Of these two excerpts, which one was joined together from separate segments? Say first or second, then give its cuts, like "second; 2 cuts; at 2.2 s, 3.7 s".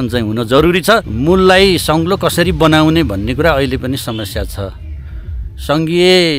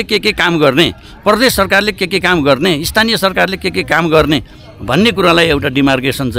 first; 1 cut; at 1.1 s